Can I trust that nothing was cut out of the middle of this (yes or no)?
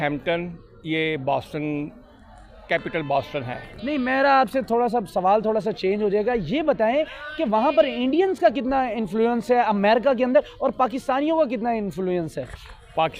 yes